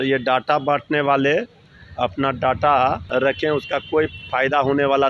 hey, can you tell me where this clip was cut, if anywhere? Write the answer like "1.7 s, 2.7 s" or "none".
3.0 s